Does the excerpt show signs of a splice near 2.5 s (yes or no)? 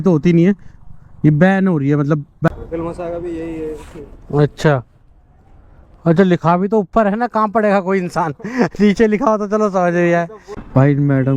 yes